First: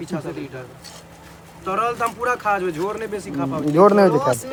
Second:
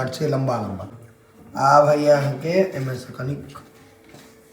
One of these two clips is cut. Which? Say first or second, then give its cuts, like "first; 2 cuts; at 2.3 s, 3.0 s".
second; 1 cut; at 1.0 s